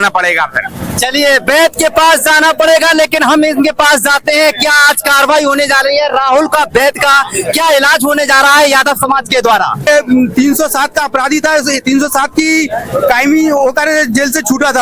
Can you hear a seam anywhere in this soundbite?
yes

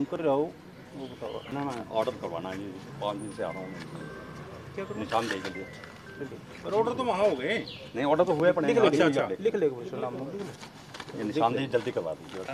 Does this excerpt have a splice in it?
yes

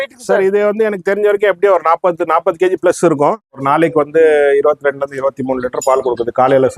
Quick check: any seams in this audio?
yes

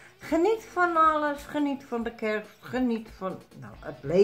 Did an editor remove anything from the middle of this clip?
no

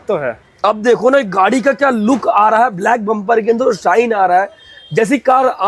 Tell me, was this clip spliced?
no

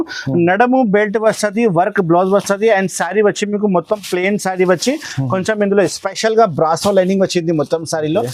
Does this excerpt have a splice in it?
no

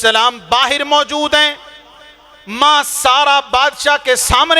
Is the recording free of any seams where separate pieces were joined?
yes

